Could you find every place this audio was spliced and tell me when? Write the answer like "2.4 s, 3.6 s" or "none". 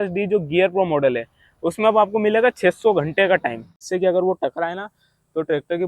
3.7 s